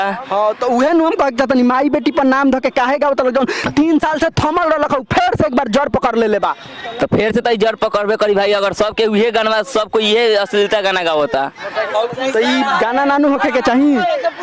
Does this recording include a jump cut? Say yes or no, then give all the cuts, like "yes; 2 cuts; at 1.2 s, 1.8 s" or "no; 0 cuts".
no; 0 cuts